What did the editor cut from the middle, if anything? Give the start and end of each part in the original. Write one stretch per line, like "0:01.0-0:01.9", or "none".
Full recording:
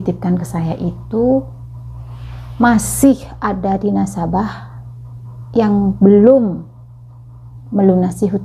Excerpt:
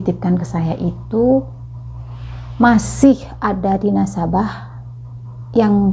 none